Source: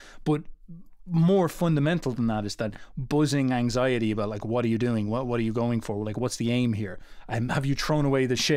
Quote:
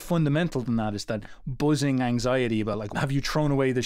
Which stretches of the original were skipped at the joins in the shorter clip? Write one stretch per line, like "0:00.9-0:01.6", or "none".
0:04.4-0:07.4